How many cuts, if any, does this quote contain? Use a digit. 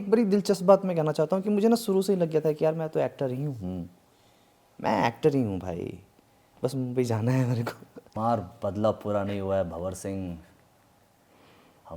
1